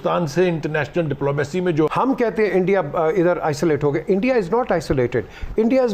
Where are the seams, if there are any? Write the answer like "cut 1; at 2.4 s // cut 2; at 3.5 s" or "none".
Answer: cut 1; at 1.9 s